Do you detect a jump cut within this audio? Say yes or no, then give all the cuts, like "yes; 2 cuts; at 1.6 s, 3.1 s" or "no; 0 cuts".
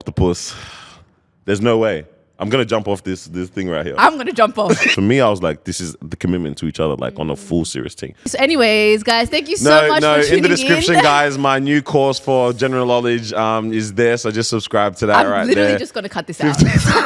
yes; 2 cuts; at 4.9 s, 8.3 s